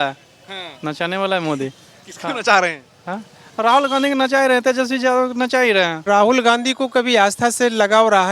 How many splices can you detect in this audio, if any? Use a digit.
1